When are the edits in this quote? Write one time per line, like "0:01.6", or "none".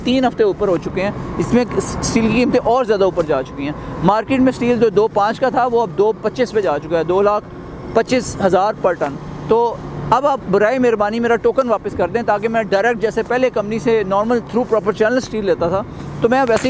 none